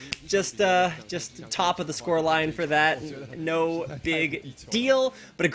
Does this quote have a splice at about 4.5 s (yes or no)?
no